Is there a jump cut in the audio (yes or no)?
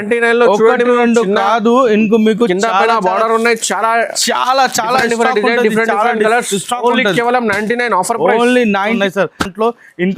yes